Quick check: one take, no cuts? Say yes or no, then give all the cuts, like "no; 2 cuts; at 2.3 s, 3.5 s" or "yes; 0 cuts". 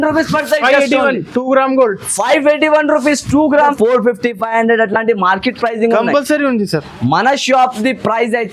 no; 1 cut; at 3.7 s